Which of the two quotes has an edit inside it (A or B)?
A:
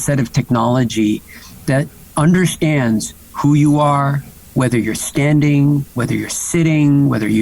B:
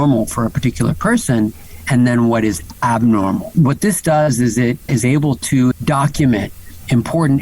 B